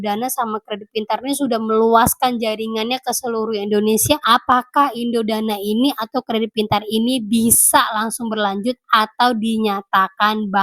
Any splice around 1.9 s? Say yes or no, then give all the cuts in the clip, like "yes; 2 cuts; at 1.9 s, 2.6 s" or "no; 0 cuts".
no; 1 cut; at 4.2 s